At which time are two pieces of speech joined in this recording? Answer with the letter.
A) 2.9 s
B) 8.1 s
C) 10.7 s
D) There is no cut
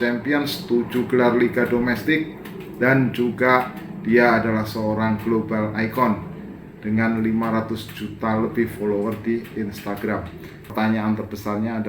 C